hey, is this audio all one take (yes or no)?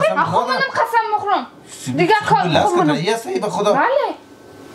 yes